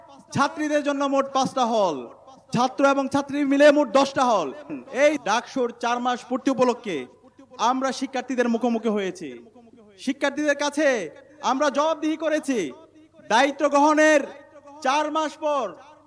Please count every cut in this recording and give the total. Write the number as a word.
one